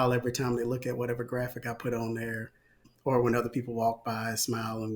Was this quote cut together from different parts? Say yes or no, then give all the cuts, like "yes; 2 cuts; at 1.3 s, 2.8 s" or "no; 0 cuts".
no; 0 cuts